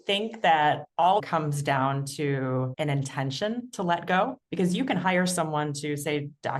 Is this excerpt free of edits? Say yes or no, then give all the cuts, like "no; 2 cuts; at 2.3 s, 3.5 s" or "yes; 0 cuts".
no; 3 cuts; at 0.9 s, 2.7 s, 4.4 s